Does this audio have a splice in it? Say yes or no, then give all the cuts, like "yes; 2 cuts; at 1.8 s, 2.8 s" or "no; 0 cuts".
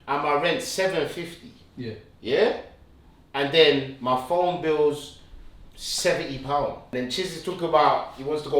yes; 1 cut; at 6.8 s